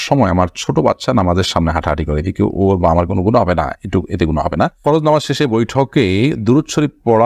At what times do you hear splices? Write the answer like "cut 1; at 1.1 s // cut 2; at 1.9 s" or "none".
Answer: none